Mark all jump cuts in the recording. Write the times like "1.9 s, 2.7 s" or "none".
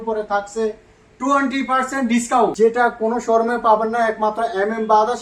2.5 s